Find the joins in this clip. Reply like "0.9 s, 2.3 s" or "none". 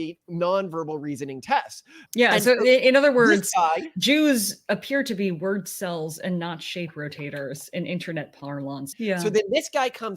8.9 s